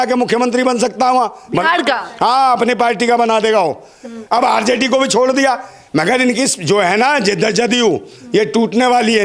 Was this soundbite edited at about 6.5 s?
no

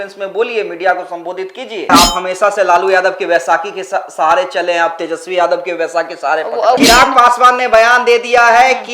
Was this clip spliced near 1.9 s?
yes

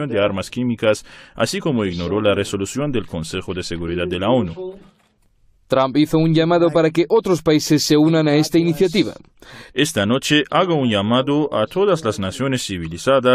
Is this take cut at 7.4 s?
no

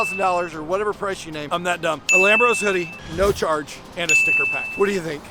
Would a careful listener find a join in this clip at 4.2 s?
no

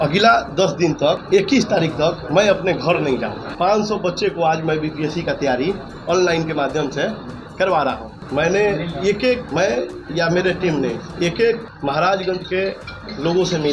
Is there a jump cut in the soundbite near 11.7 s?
yes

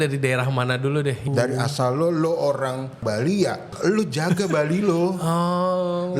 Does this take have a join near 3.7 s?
yes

